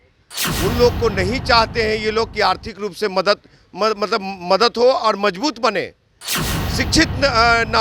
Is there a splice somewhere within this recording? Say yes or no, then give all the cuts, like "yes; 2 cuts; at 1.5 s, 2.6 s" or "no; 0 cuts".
no; 0 cuts